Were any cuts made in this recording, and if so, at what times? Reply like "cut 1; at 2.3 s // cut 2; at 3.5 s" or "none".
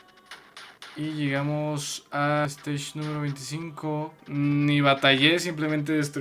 cut 1; at 2.4 s // cut 2; at 4.2 s